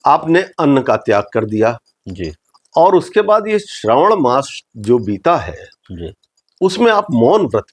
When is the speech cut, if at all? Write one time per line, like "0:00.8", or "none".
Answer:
none